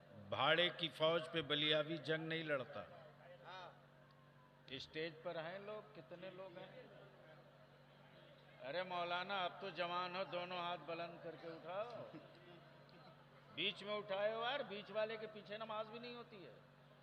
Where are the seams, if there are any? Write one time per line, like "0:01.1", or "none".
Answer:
none